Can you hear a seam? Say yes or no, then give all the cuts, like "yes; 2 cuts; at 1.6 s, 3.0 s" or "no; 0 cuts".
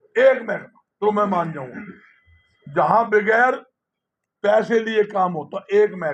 no; 0 cuts